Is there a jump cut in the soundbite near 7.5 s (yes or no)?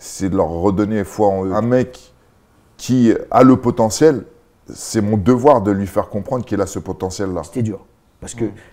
yes